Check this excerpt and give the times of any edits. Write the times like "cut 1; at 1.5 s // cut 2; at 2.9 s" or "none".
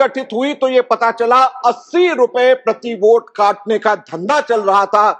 none